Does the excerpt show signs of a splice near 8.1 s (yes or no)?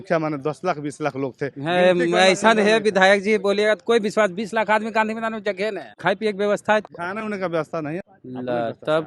yes